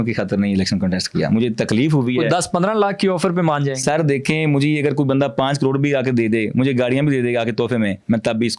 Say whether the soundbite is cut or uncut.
uncut